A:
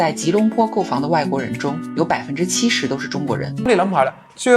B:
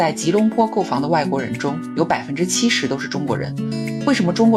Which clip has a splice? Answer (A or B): A